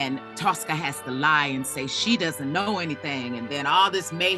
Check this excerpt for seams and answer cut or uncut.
uncut